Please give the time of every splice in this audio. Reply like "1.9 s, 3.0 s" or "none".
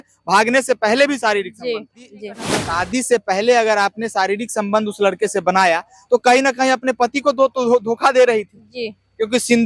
2.5 s